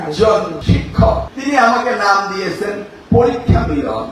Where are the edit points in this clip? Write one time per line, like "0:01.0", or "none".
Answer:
0:00.9